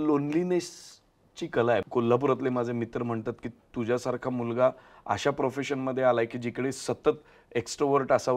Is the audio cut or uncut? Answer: cut